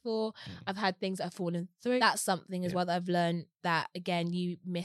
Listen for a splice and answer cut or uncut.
cut